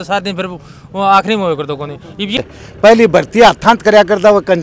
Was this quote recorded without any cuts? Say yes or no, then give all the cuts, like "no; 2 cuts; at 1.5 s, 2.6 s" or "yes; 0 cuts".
no; 1 cut; at 2.4 s